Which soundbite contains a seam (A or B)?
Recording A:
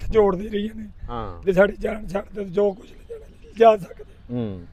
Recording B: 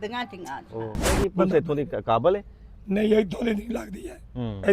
B